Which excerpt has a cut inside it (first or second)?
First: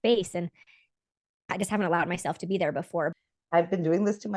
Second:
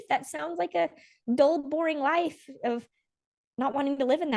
first